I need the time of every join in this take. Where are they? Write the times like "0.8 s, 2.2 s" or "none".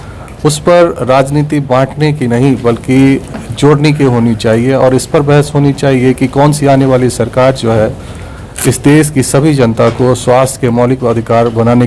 none